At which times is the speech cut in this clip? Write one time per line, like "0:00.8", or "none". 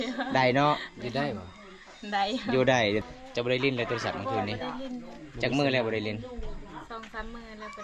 0:03.0